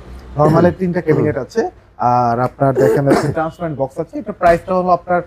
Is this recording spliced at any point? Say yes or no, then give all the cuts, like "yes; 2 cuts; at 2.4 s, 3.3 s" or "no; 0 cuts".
no; 0 cuts